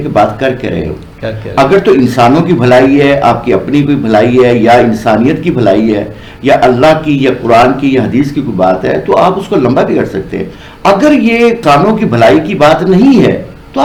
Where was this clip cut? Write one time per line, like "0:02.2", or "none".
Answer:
none